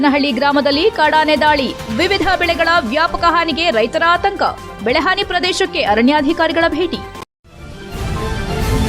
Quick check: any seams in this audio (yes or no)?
yes